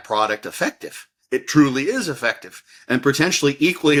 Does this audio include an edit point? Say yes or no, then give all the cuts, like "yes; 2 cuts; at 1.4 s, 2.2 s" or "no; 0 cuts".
no; 0 cuts